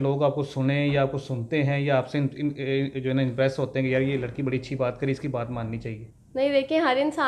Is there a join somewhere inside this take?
no; 0 cuts

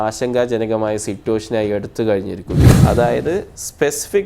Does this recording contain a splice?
yes; 1 cut; at 2.7 s

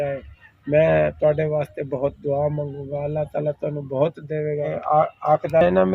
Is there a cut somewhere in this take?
yes; 1 cut; at 4.7 s

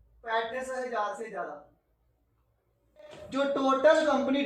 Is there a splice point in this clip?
yes; 1 cut; at 3.2 s

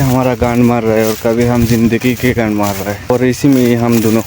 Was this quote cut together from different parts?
yes; 1 cut; at 3.1 s

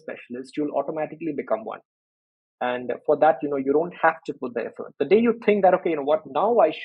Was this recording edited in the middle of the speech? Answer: no; 0 cuts

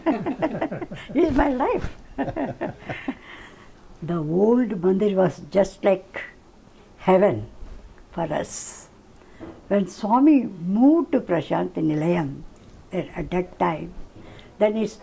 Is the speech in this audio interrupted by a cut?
yes; 1 cut; at 3.2 s

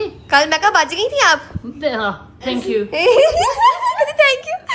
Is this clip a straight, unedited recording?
yes; 0 cuts

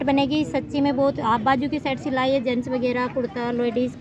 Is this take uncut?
yes; 0 cuts

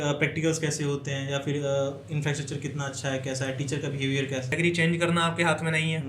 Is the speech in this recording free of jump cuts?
no; 1 cut; at 4.5 s

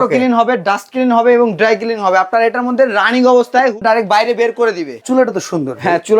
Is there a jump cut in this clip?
yes; 2 cuts; at 3.8 s, 4.9 s

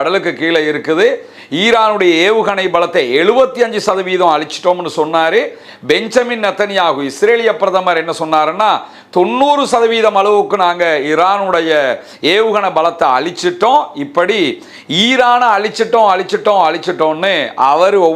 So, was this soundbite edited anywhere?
no; 0 cuts

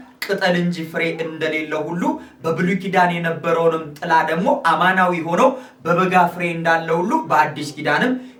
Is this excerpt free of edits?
yes; 0 cuts

